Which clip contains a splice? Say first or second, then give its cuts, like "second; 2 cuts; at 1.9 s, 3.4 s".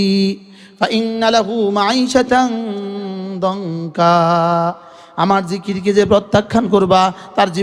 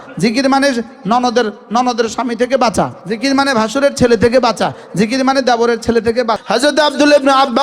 second; 2 cuts; at 3.0 s, 6.4 s